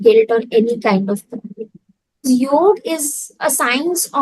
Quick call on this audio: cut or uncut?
cut